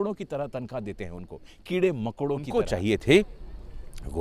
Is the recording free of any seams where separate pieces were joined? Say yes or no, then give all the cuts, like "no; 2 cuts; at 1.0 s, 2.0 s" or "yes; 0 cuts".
no; 1 cut; at 2.5 s